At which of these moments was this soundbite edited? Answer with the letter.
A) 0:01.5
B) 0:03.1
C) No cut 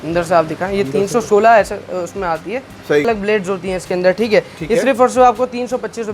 B